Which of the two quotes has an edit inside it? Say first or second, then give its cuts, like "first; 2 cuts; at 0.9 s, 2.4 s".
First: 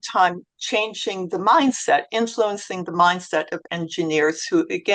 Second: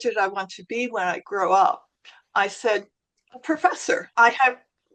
second; 2 cuts; at 1.2 s, 4.1 s